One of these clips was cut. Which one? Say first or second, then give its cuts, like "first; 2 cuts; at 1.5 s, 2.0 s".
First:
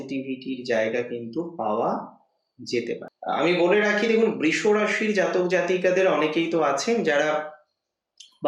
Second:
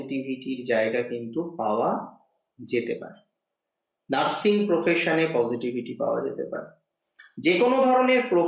first; 1 cut; at 3.1 s